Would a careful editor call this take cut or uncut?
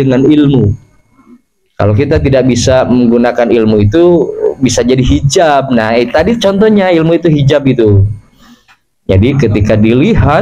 uncut